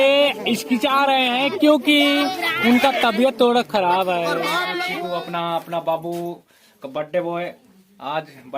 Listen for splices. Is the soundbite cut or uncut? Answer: cut